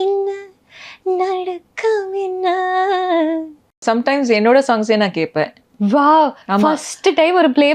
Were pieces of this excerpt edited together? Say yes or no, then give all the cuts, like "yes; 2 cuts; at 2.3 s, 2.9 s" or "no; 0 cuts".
yes; 2 cuts; at 3.8 s, 5.6 s